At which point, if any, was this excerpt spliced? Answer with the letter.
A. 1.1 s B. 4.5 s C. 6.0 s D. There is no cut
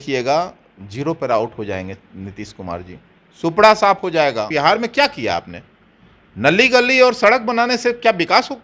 B